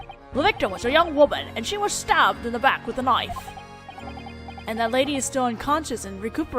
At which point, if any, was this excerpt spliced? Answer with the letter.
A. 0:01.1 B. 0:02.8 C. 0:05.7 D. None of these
A